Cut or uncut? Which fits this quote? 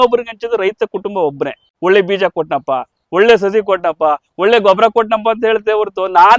cut